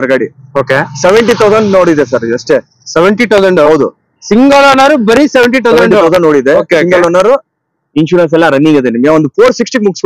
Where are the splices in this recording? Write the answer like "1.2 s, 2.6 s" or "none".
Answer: none

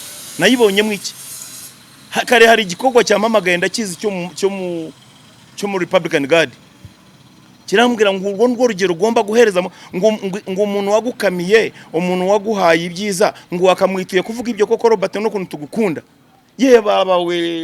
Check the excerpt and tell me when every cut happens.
none

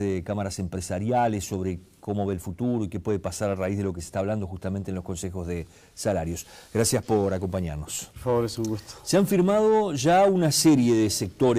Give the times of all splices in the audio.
9.5 s

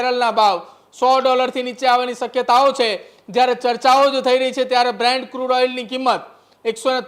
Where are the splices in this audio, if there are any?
none

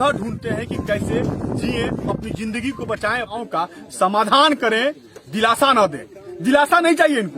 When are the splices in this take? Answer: 3.3 s

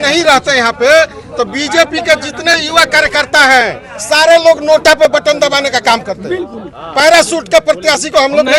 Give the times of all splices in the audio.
none

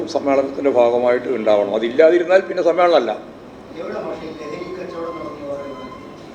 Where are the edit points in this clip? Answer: none

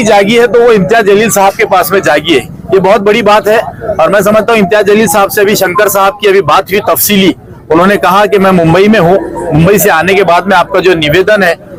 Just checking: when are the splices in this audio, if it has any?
none

